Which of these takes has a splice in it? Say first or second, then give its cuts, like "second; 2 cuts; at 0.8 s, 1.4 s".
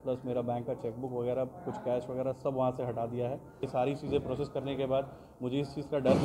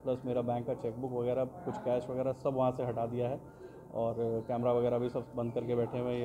first; 1 cut; at 3.7 s